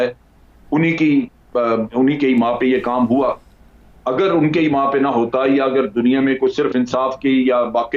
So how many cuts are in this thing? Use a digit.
0